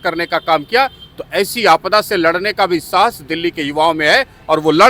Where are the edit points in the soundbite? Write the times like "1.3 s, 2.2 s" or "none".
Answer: none